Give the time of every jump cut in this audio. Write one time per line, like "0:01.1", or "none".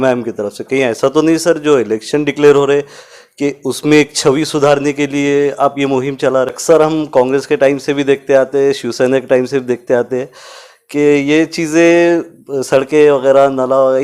0:06.6

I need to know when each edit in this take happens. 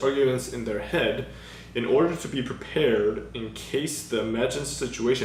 none

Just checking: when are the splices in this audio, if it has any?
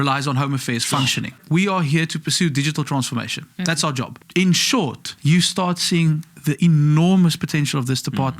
0:01.4
0:04.2
0:05.1

